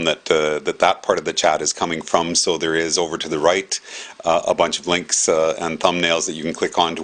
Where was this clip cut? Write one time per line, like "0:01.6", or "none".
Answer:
none